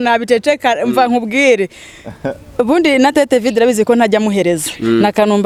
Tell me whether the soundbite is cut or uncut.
uncut